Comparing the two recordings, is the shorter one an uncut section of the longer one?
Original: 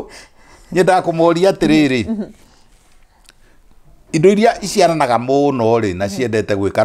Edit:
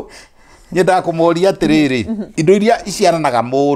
no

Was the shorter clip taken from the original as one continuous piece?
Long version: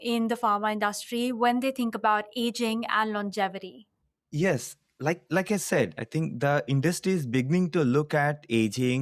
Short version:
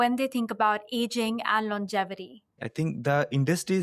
no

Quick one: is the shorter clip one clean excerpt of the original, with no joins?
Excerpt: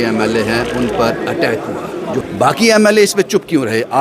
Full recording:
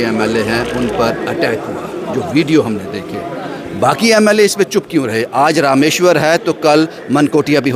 no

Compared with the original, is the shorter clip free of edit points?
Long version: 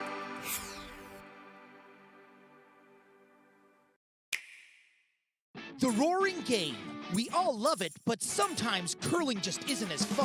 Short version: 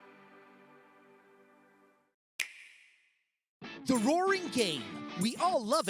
no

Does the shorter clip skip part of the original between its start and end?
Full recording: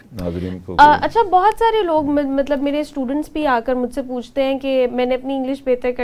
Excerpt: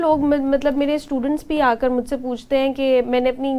no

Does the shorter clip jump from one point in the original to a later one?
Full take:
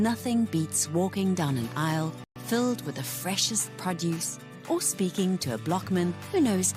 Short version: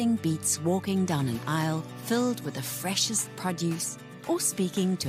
yes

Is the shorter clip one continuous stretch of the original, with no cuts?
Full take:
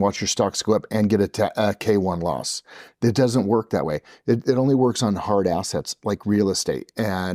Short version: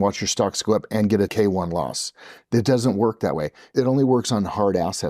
no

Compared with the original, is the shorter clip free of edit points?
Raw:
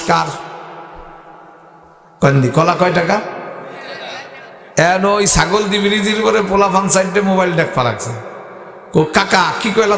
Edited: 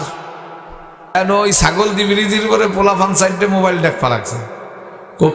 no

